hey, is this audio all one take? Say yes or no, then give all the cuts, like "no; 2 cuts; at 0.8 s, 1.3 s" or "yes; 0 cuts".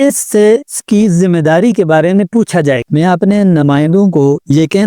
no; 1 cut; at 2.9 s